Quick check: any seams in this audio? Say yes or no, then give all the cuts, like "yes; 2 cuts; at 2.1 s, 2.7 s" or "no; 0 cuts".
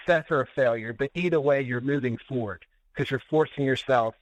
no; 0 cuts